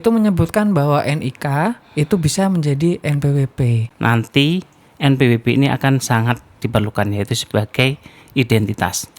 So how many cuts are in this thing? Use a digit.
1